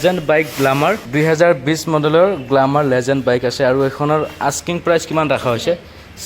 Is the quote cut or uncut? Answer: cut